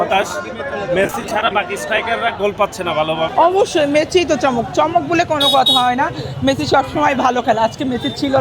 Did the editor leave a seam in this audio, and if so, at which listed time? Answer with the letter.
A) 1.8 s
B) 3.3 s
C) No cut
B